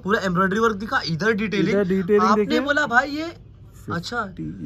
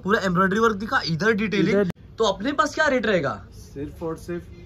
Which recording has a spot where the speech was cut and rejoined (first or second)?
second